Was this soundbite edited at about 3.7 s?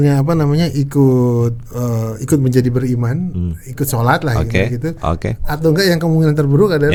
no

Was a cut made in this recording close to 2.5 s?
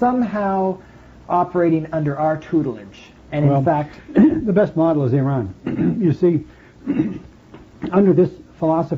no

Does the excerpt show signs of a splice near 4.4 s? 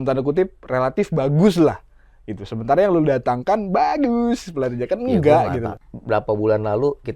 no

